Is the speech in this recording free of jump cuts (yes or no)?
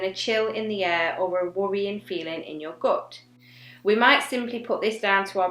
yes